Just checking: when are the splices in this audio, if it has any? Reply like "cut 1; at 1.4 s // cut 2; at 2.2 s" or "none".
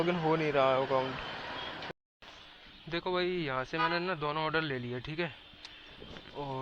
cut 1; at 1.9 s

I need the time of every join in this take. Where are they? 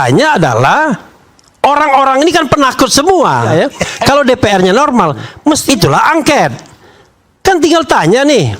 cut 1; at 3.5 s // cut 2; at 5.6 s

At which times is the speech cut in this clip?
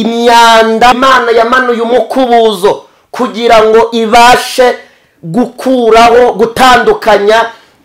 cut 1; at 1.0 s

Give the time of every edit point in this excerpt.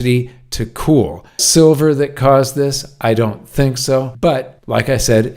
cut 1; at 1.4 s // cut 2; at 4.4 s

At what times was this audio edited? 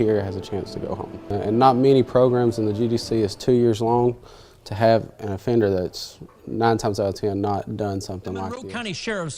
cut 1; at 8.5 s

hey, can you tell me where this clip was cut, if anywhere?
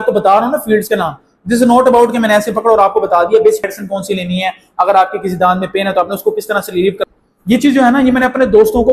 cut 1; at 3.7 s // cut 2; at 7.0 s

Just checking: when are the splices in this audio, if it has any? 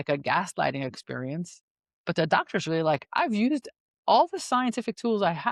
none

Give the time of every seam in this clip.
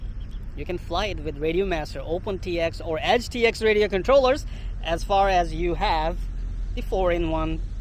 none

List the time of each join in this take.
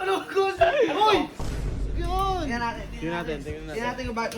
cut 1; at 1.5 s

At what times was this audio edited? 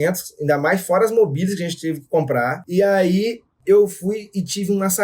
cut 1; at 2.6 s // cut 2; at 3.5 s

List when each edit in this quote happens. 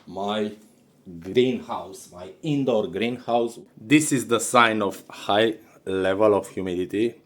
cut 1; at 3.7 s

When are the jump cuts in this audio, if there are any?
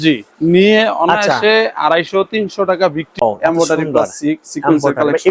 cut 1; at 3.2 s

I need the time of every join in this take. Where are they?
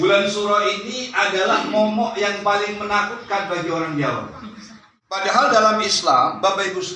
cut 1; at 5.2 s

